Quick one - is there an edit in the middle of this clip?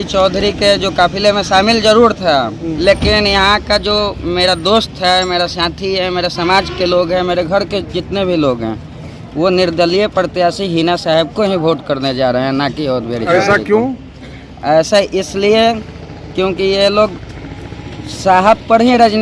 yes; 1 cut; at 2.6 s

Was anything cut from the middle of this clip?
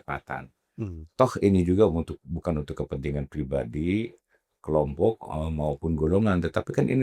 no; 0 cuts

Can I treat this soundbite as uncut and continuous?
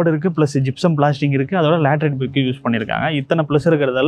yes; 0 cuts

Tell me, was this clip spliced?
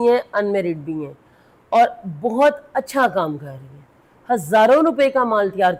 no; 0 cuts

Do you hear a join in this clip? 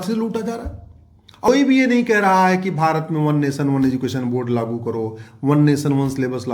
yes; 1 cut; at 1.5 s

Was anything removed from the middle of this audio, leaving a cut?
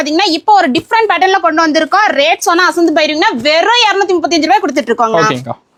no; 0 cuts

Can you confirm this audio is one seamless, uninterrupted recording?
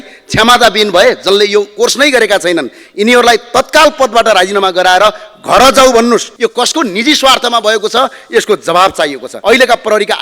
no; 2 cuts; at 6.3 s, 9.3 s

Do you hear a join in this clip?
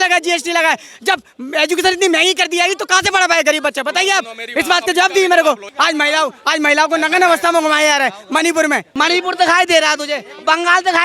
yes; 2 cuts; at 5.7 s, 8.9 s

